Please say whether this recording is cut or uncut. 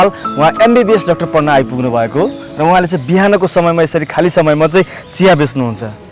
uncut